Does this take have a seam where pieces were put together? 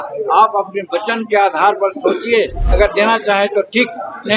no; 0 cuts

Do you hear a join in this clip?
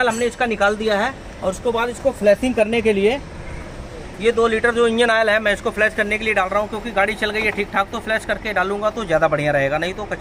no; 0 cuts

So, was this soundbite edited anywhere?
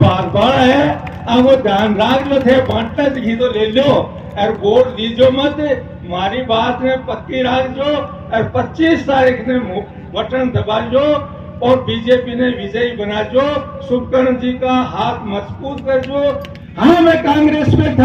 yes; 1 cut; at 16.5 s

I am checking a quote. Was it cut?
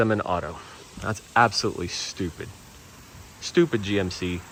no; 0 cuts

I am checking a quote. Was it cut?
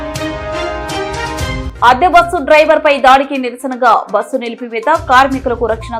yes; 1 cut; at 1.7 s

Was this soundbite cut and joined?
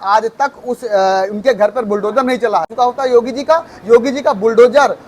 yes; 1 cut; at 2.7 s

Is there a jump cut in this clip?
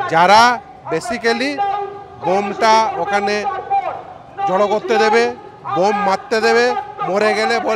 no; 0 cuts

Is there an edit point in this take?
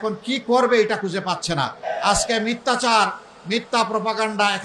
yes; 1 cut; at 1.8 s

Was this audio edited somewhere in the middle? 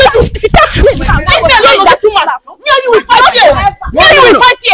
no; 0 cuts

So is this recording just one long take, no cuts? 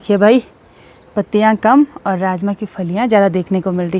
yes; 0 cuts

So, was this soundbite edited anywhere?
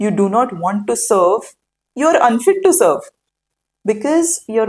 no; 0 cuts

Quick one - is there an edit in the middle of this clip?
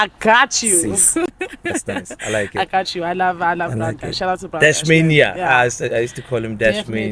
no; 0 cuts

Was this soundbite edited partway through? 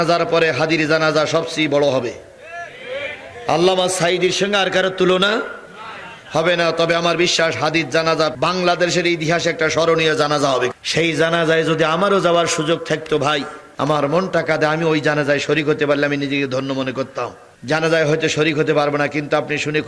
no; 0 cuts

